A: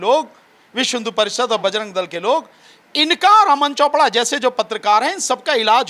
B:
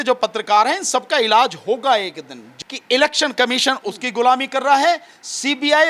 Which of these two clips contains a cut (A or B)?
B